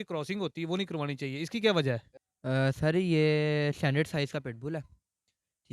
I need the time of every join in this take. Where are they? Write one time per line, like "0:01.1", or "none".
0:02.1